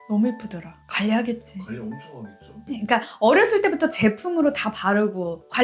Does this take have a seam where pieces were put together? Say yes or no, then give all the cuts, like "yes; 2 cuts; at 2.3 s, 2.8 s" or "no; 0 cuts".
no; 0 cuts